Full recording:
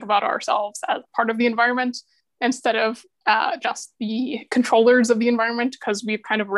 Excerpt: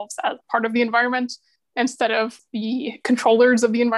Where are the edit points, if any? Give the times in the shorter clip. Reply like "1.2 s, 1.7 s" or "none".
2.4 s